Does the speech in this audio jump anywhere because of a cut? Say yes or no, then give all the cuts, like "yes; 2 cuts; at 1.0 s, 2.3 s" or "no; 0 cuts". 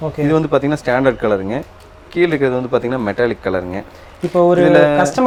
no; 0 cuts